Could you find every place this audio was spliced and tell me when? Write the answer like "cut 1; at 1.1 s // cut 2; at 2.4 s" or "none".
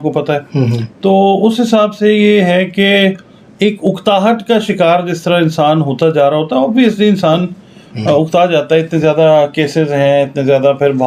none